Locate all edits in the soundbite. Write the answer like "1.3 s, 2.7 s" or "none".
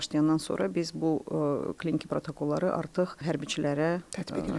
3.2 s